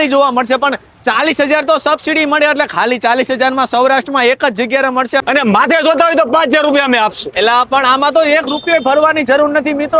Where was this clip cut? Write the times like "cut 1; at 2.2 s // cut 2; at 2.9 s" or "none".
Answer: cut 1; at 5.2 s